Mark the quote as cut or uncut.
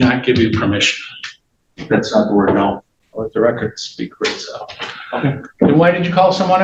uncut